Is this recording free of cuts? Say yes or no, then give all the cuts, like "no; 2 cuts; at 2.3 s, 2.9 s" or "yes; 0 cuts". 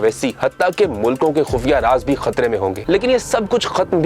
no; 1 cut; at 2.8 s